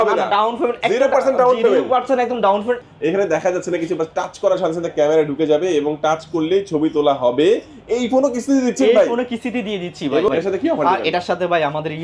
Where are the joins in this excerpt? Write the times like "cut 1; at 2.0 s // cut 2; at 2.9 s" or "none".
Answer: cut 1; at 2.9 s // cut 2; at 10.3 s